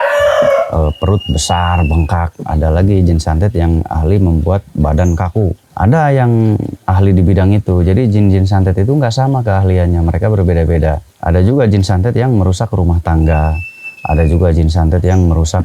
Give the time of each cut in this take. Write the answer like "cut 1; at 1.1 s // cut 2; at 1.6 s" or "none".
cut 1; at 5.6 s // cut 2; at 6.8 s // cut 3; at 11.1 s